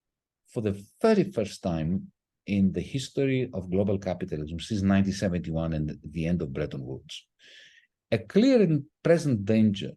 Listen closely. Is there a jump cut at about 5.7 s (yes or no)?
no